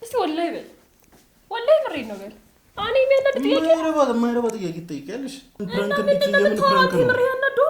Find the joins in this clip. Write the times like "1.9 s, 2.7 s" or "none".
5.6 s